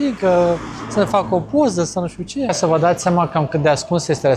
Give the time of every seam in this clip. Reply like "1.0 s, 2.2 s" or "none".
2.6 s